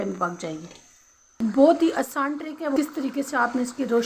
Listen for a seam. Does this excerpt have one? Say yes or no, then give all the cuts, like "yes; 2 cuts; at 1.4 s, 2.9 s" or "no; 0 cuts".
yes; 2 cuts; at 1.4 s, 2.8 s